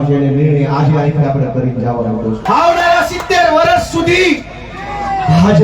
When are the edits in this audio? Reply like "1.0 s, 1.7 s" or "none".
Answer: 2.4 s